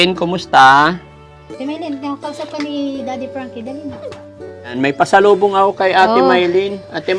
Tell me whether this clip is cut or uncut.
cut